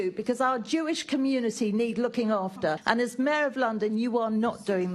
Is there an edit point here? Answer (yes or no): yes